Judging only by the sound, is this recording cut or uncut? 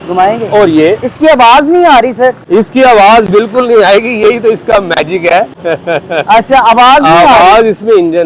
cut